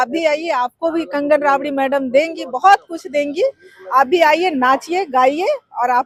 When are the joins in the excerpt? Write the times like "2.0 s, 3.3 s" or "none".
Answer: none